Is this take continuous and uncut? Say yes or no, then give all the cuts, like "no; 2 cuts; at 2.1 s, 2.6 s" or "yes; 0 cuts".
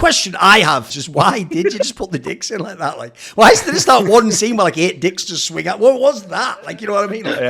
no; 1 cut; at 0.9 s